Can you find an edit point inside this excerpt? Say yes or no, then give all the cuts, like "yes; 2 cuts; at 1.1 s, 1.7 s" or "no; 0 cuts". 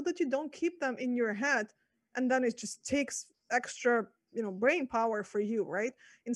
no; 0 cuts